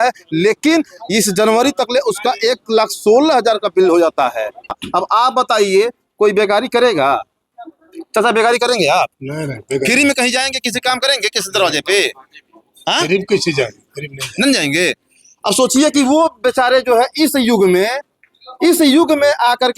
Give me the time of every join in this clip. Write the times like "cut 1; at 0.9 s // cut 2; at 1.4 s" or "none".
cut 1; at 4.8 s